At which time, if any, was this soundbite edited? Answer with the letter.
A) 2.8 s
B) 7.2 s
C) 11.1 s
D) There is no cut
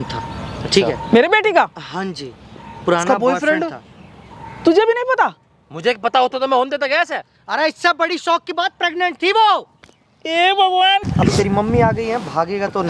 C